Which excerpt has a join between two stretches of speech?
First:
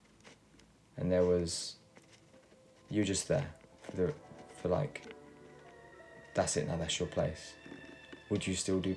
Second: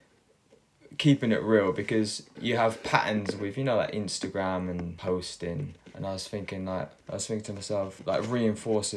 second; 5 cuts; at 2.3 s, 4.9 s, 5.8 s, 7.0 s, 8.0 s

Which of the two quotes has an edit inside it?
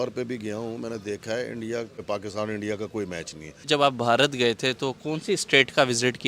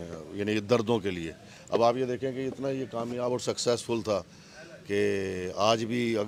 first; 2 cuts; at 2.0 s, 3.7 s

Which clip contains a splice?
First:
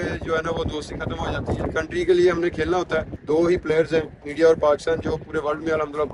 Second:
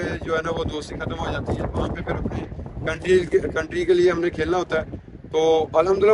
first; 2 cuts; at 1.7 s, 3.1 s

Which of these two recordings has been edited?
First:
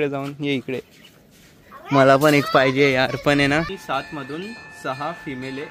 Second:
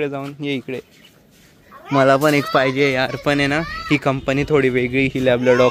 first; 1 cut; at 3.8 s

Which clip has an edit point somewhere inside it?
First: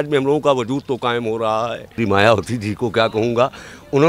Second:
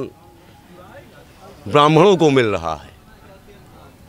first; 1 cut; at 1.9 s

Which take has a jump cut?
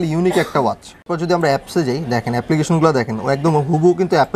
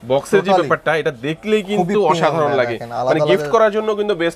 first; 1 cut; at 1.1 s

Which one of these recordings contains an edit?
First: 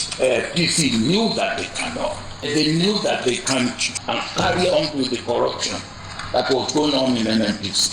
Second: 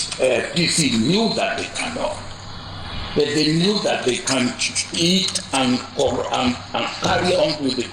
first; 2 cuts; at 2.5 s, 4.0 s

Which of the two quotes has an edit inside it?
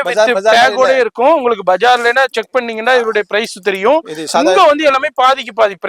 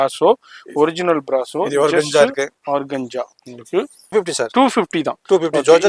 second; 1 cut; at 4.1 s

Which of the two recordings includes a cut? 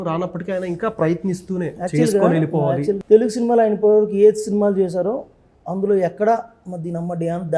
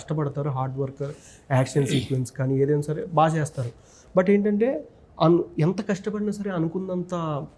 first; 1 cut; at 3.0 s

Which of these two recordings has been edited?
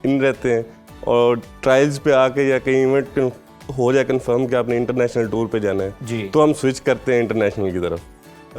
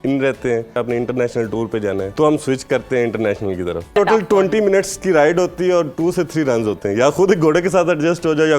second; 3 cuts; at 0.7 s, 2.1 s, 3.9 s

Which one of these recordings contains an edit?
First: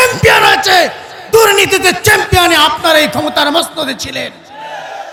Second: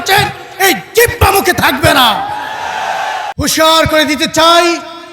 second; 1 cut; at 3.3 s

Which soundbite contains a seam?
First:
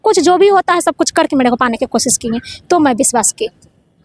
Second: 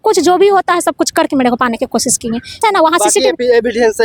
second; 1 cut; at 2.6 s

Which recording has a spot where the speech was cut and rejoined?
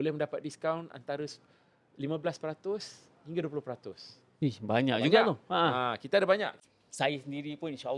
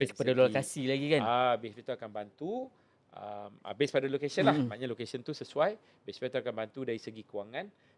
first; 1 cut; at 6.6 s

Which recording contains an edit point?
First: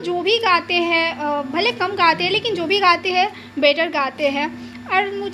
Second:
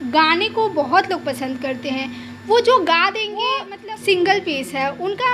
second; 1 cut; at 3.7 s

